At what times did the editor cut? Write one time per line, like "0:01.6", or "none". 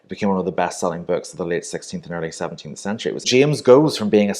0:03.3